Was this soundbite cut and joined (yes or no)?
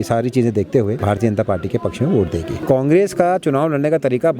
yes